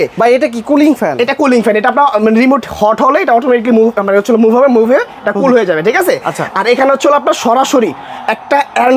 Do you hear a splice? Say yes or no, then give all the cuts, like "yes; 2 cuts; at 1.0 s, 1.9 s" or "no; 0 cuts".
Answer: no; 0 cuts